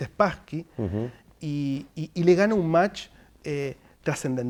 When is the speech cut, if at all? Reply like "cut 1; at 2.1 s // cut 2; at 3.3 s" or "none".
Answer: none